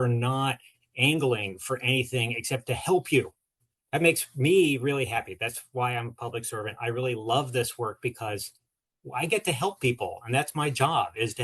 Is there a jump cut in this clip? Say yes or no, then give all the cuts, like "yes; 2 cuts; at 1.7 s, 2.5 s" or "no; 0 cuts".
no; 0 cuts